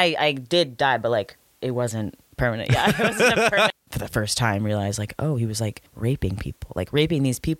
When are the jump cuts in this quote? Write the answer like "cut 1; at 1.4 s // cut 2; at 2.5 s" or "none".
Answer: cut 1; at 2.3 s // cut 2; at 3.7 s // cut 3; at 5.8 s